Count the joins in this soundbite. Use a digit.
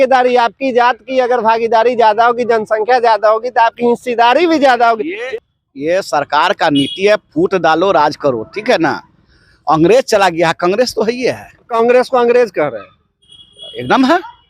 2